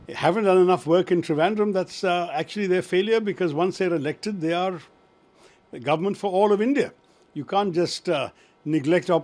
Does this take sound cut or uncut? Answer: uncut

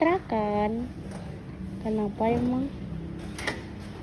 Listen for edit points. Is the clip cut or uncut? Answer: uncut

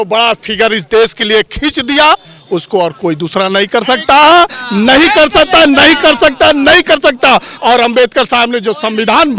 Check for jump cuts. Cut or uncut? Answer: uncut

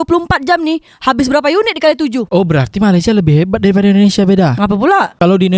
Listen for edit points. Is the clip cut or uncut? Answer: cut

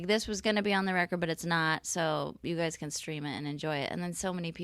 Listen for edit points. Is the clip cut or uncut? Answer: uncut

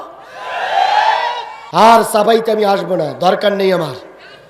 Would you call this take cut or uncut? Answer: cut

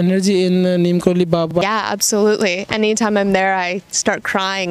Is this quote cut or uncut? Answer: cut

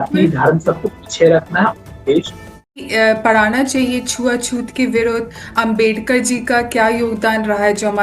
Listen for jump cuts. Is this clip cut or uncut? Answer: cut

